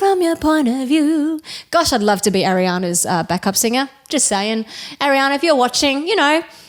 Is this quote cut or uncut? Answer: uncut